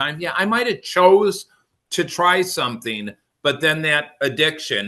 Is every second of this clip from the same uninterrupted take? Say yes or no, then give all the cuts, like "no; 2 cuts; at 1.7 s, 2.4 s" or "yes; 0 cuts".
yes; 0 cuts